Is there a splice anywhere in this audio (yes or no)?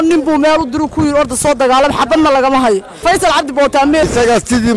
yes